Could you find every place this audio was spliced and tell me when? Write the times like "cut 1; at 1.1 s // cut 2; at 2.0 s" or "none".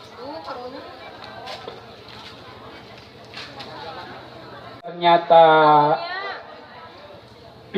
cut 1; at 5.0 s

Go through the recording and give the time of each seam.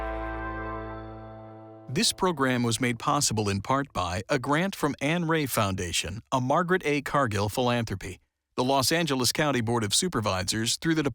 cut 1; at 1.8 s

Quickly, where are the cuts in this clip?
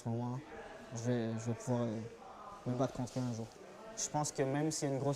cut 1; at 3.5 s

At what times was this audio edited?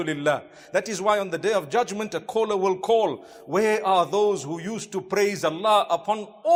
none

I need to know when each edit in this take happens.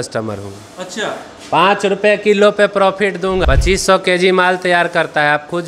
cut 1; at 3.4 s

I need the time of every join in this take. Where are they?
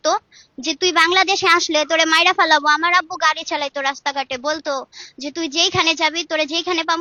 none

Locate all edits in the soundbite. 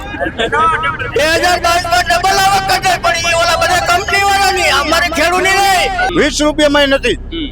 cut 1; at 6.0 s

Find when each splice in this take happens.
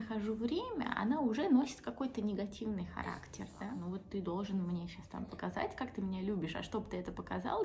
cut 1; at 3.6 s

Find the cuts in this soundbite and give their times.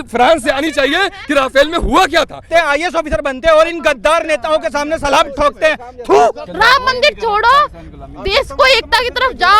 cut 1; at 2.5 s // cut 2; at 6.4 s

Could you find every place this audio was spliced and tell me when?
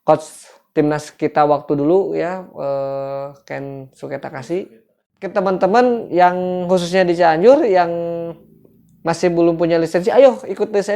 cut 1; at 5.3 s

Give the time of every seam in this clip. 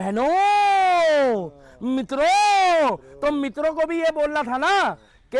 none

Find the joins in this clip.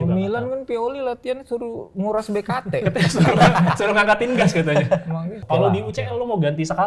cut 1; at 5.4 s

